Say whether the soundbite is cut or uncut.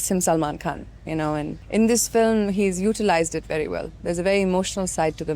cut